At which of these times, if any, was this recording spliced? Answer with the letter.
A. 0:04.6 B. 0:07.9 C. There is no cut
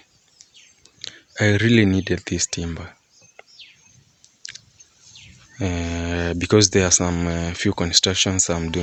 C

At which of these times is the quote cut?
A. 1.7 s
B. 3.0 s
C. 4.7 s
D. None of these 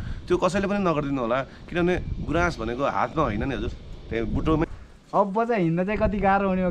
C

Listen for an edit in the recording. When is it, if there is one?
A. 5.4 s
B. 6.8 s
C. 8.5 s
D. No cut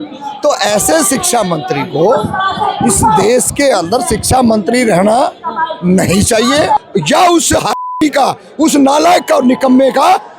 B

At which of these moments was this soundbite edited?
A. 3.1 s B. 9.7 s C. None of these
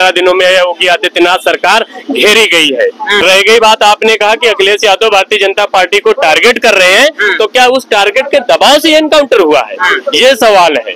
A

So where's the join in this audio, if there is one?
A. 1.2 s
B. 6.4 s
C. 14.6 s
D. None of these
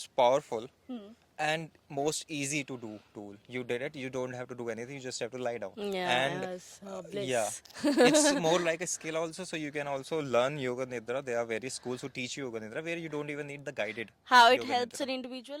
D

